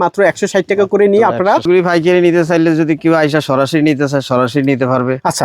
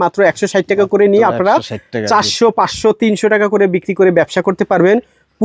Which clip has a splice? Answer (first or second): first